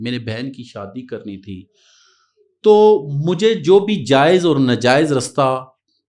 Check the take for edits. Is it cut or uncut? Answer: uncut